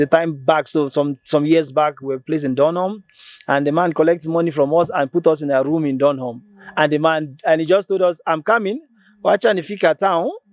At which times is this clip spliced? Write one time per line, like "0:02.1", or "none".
none